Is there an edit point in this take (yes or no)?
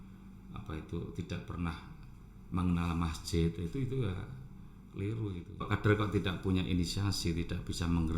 yes